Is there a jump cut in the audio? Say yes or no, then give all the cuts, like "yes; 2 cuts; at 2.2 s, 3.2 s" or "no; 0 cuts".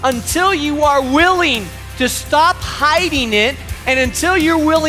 no; 0 cuts